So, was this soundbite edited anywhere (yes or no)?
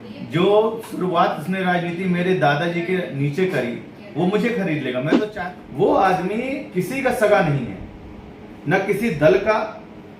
yes